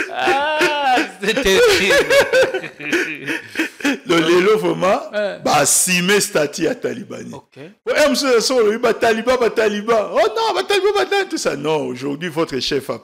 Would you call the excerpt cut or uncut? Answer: uncut